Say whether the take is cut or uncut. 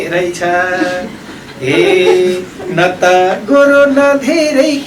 uncut